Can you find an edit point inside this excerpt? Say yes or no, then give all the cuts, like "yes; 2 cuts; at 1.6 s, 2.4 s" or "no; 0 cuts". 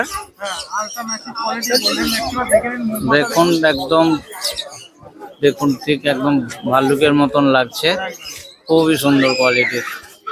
no; 0 cuts